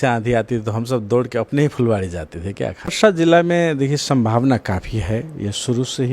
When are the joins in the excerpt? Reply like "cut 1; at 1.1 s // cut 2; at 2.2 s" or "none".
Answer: cut 1; at 2.9 s